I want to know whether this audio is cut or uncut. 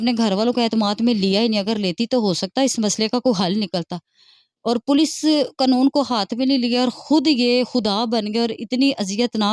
uncut